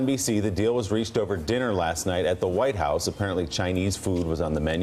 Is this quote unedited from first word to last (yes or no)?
yes